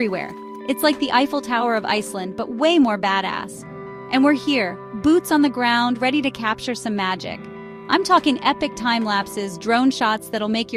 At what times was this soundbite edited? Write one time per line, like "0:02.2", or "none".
none